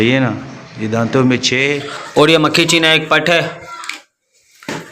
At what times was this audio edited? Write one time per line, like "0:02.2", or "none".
0:01.9

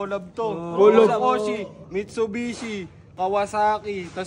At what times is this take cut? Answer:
0:03.1

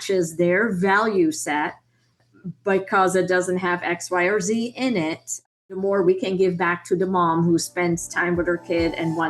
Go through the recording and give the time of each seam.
0:05.5

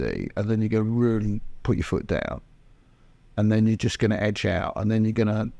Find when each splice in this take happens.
none

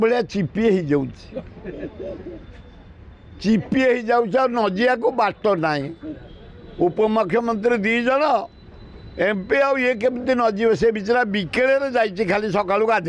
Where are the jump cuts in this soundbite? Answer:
none

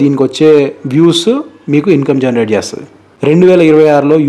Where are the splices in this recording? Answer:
0:03.3

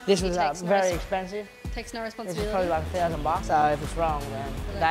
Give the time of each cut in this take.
none

